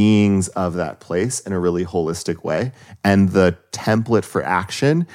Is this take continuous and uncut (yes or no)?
yes